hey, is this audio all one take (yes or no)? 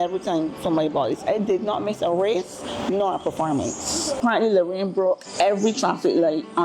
no